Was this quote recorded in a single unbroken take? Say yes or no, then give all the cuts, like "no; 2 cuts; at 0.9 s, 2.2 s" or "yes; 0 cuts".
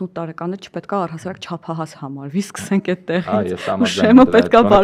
yes; 0 cuts